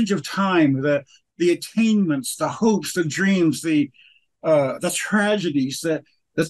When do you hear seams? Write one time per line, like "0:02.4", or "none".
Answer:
none